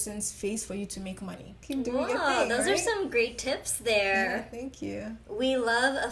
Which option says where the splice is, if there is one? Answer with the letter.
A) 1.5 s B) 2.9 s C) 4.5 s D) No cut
A